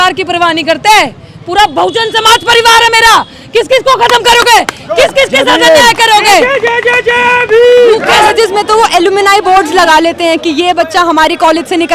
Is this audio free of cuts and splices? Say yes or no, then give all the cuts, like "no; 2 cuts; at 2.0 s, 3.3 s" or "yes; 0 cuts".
no; 1 cut; at 8.1 s